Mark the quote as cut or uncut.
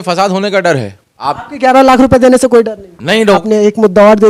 cut